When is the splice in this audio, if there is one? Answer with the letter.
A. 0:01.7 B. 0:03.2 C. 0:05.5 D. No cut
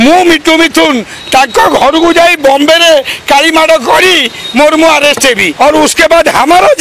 C